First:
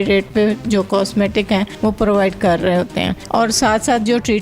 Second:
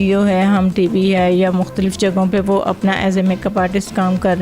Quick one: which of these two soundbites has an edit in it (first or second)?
first